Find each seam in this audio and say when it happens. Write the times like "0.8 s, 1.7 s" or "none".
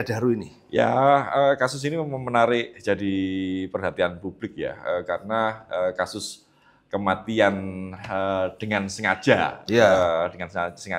none